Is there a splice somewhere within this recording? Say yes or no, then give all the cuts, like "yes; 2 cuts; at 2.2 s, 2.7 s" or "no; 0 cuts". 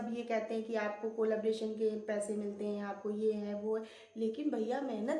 no; 0 cuts